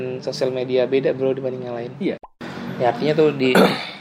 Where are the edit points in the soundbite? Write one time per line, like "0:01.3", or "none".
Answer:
0:02.3

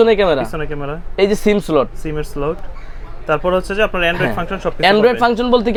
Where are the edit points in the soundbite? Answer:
none

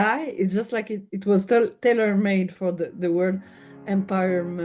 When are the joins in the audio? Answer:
none

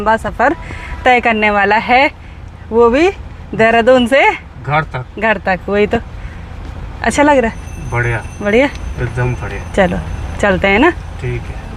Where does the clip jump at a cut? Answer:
none

